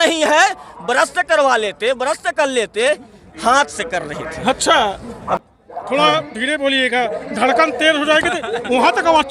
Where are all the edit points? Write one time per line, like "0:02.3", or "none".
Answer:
0:05.4